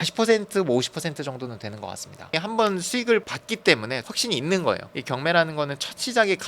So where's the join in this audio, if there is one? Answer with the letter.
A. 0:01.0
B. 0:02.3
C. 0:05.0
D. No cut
B